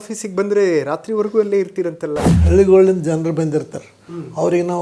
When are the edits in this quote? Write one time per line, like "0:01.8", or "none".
0:02.3